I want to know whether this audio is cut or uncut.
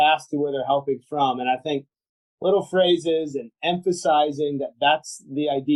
uncut